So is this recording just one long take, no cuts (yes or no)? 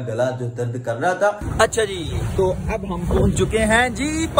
no